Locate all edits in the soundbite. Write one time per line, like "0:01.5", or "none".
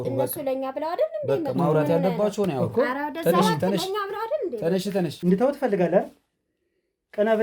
0:05.2